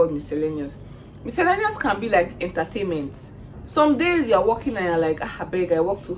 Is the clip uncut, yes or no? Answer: yes